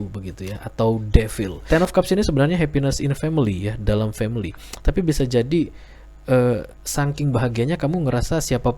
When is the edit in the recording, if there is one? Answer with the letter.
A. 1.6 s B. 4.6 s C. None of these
A